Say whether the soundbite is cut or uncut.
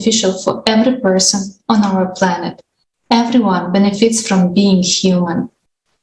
uncut